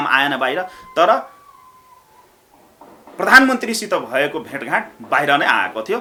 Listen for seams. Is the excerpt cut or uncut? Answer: uncut